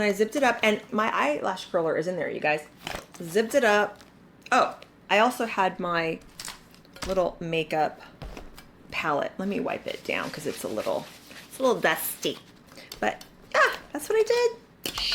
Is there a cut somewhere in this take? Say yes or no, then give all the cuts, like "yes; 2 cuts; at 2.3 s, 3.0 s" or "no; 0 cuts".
no; 0 cuts